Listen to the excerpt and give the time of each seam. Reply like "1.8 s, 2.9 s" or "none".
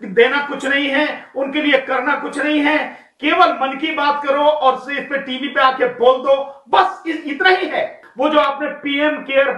8.0 s